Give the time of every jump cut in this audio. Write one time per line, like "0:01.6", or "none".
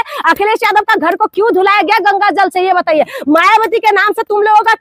none